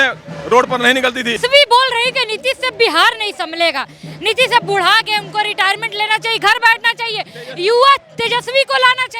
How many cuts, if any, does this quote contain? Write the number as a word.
one